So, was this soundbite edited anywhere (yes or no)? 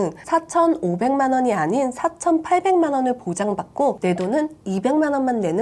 no